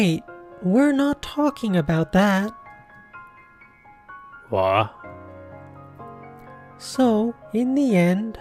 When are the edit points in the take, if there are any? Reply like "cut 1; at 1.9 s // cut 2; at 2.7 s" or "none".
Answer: none